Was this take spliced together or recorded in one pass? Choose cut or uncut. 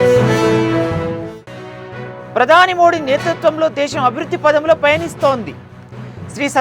uncut